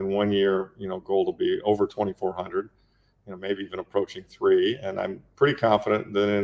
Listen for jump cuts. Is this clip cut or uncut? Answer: uncut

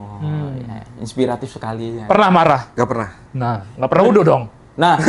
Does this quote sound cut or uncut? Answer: cut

